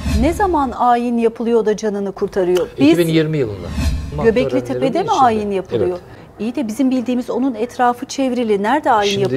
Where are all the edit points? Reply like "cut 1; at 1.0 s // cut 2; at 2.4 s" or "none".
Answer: cut 1; at 4.1 s